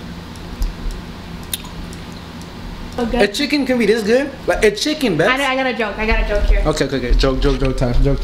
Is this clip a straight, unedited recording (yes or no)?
no